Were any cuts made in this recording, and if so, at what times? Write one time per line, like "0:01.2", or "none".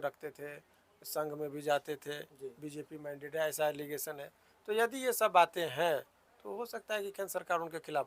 none